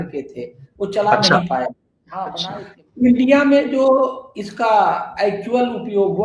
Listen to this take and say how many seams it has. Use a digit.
1